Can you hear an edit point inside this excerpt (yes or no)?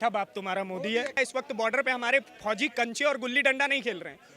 yes